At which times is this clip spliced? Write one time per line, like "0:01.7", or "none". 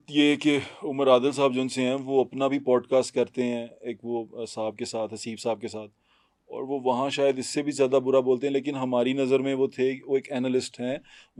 none